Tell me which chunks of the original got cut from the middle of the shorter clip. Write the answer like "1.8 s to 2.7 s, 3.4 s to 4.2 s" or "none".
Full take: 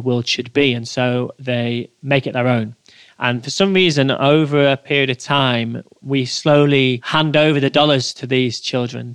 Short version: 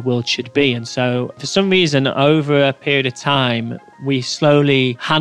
1.4 s to 3.4 s